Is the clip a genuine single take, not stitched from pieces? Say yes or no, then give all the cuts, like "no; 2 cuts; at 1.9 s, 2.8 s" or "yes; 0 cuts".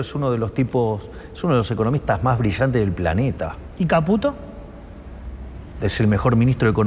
yes; 0 cuts